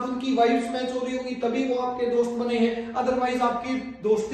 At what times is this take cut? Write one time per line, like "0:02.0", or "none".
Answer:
none